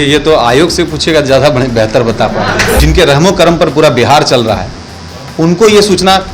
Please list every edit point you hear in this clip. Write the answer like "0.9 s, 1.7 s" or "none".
2.8 s